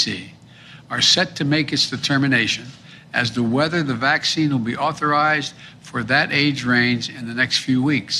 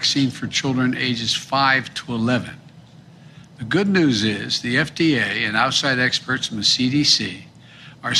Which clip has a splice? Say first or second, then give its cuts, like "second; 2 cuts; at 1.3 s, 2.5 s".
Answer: second; 1 cut; at 5.9 s